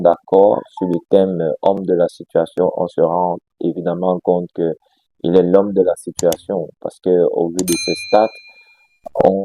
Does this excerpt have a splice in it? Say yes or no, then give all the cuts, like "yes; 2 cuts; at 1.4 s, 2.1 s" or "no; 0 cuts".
no; 0 cuts